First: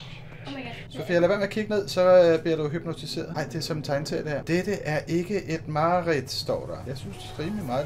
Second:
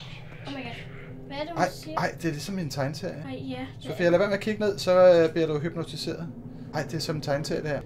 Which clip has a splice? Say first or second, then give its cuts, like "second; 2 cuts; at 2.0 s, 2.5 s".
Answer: first; 4 cuts; at 0.9 s, 3.3 s, 4.4 s, 7.0 s